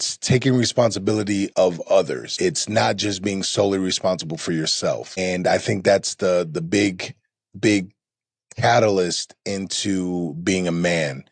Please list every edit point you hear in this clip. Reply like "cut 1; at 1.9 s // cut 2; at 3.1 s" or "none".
cut 1; at 1.5 s // cut 2; at 2.3 s // cut 3; at 5.2 s